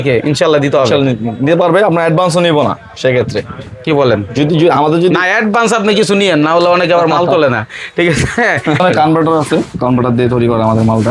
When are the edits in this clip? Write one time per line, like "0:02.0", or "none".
0:08.8